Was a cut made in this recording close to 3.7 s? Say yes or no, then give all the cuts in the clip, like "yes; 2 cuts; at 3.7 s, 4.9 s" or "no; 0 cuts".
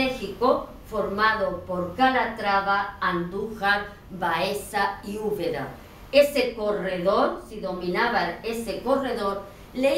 yes; 1 cut; at 3.7 s